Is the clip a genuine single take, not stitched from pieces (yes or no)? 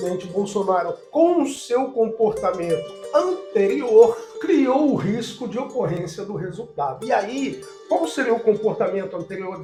yes